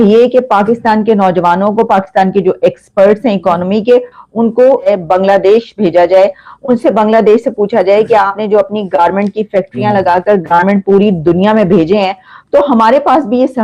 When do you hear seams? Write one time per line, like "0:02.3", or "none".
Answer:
0:04.9